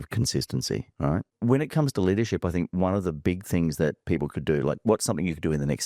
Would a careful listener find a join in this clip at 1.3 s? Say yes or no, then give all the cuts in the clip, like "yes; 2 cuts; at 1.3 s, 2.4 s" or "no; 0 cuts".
yes; 1 cut; at 1.3 s